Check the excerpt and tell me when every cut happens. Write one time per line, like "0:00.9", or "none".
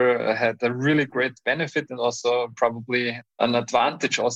0:03.4